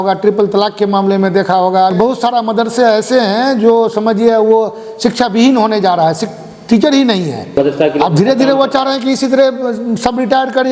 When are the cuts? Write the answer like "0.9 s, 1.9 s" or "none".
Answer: 1.9 s, 7.5 s

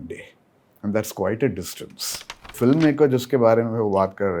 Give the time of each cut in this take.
2.5 s

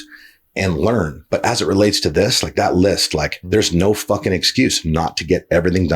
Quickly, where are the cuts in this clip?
3.4 s

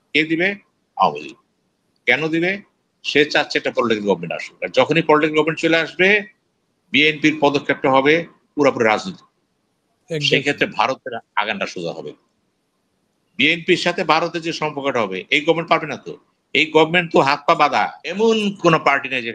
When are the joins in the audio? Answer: 18.0 s

